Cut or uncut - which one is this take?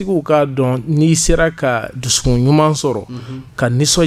uncut